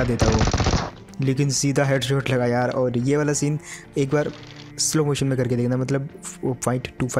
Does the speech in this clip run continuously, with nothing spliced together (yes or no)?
yes